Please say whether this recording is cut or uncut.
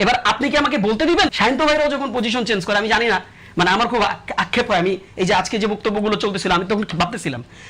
cut